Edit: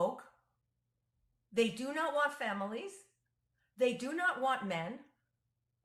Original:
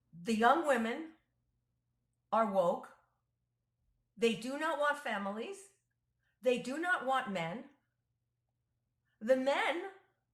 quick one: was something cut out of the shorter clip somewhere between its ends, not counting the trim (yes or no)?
no